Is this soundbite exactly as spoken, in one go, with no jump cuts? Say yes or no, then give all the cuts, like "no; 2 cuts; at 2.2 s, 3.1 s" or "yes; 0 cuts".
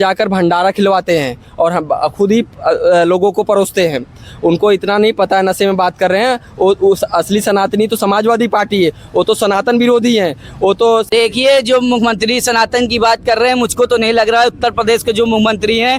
no; 1 cut; at 11.1 s